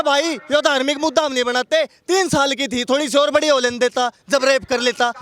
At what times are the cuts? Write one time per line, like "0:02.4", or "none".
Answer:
none